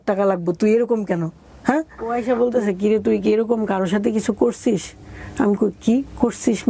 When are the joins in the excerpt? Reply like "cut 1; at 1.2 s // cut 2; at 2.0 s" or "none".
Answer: cut 1; at 2.1 s